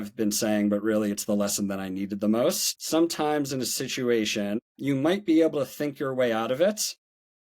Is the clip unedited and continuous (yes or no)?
no